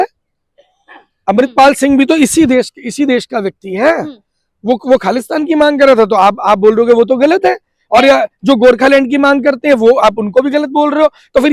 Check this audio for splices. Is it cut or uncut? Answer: uncut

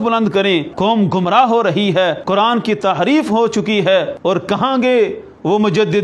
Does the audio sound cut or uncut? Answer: cut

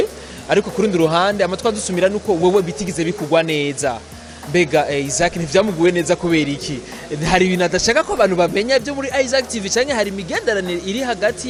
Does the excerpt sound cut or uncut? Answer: uncut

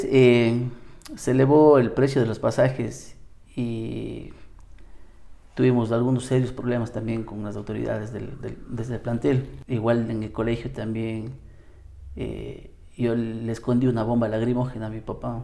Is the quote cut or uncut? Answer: cut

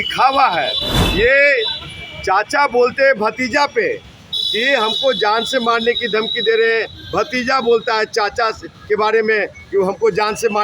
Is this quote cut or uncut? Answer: uncut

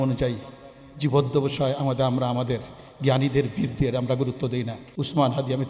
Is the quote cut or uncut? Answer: cut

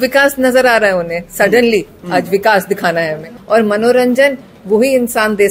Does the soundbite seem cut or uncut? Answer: cut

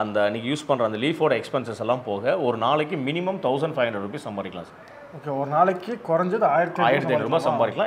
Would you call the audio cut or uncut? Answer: uncut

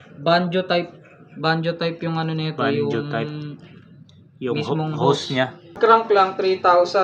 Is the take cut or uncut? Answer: cut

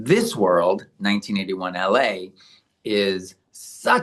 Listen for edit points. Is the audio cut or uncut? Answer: uncut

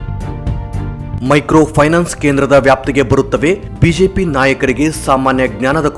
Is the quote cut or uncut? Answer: cut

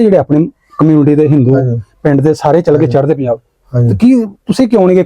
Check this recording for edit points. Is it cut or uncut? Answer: uncut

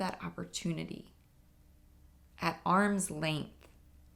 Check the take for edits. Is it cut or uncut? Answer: uncut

